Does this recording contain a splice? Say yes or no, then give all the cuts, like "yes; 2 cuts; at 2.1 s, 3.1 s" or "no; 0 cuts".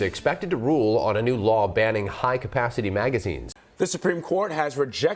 yes; 1 cut; at 3.5 s